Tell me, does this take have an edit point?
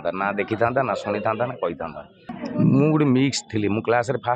yes; 1 cut; at 2.3 s

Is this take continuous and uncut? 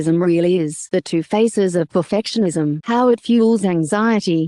yes; 0 cuts

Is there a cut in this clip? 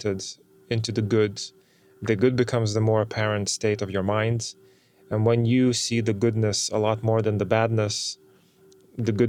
no; 0 cuts

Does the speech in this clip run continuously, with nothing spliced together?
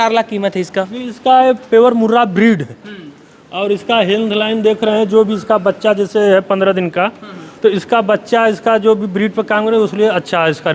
yes; 0 cuts

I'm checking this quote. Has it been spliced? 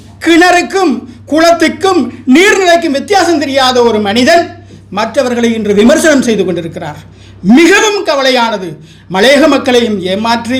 no; 0 cuts

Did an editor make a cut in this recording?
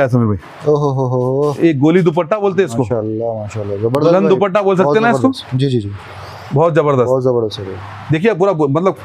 no; 0 cuts

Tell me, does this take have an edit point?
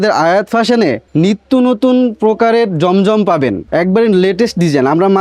yes; 2 cuts; at 1.0 s, 3.6 s

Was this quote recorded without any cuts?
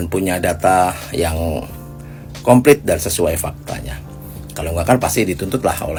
yes; 0 cuts

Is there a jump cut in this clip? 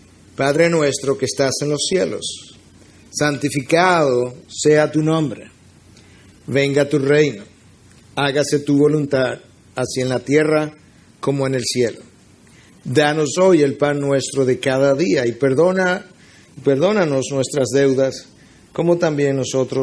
yes; 1 cut; at 5.0 s

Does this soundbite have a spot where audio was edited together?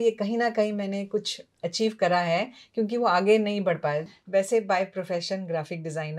yes; 1 cut; at 4.1 s

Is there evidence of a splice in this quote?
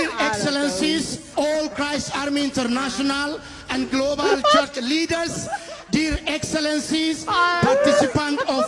no; 0 cuts

